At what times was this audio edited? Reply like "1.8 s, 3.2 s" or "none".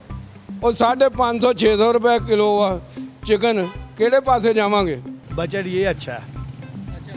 5.2 s

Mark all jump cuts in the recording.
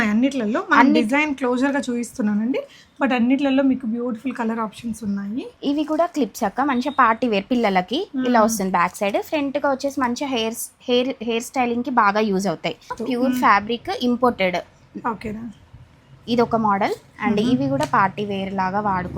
5.5 s, 13.0 s

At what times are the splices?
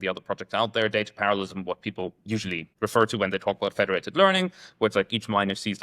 2.7 s

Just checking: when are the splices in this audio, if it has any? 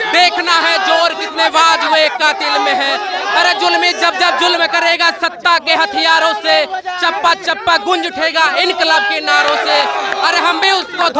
none

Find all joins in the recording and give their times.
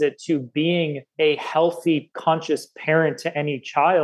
1.0 s, 2.1 s

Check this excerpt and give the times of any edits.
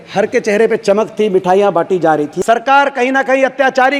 2.3 s

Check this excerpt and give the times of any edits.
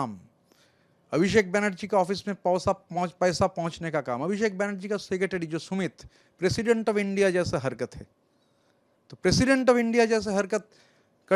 none

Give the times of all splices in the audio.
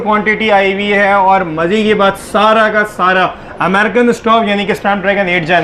none

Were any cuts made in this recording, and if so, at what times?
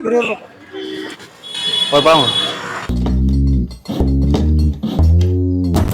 2.9 s

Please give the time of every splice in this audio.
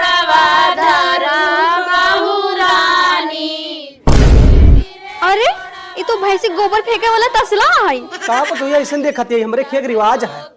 none

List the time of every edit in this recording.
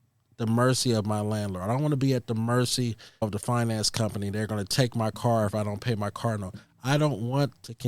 none

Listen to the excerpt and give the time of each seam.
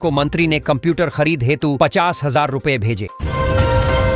3.2 s

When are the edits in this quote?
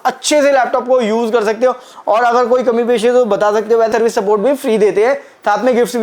3.9 s

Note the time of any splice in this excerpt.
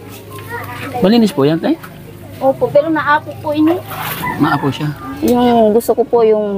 4.9 s

